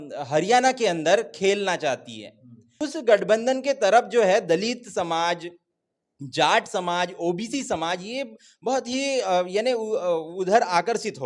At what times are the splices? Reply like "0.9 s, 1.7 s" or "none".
2.8 s